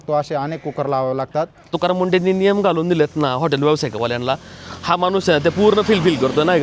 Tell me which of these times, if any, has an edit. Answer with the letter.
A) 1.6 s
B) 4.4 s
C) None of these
A